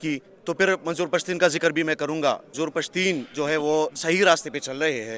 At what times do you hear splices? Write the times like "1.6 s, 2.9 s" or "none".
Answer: 2.5 s